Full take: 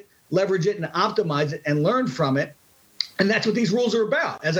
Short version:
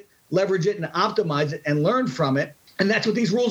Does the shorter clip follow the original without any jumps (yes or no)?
no